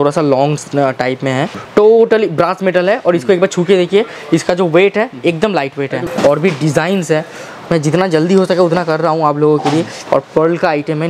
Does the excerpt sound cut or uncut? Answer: cut